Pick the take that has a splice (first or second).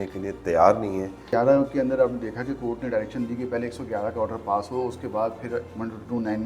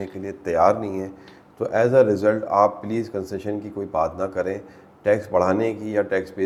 first